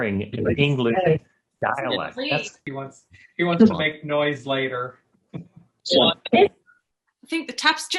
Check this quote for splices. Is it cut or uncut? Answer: cut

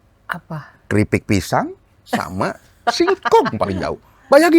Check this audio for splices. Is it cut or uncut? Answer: uncut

